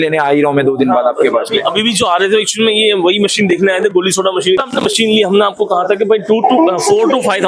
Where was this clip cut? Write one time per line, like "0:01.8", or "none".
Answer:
0:04.6